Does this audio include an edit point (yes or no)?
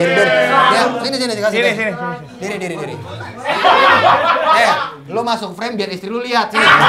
no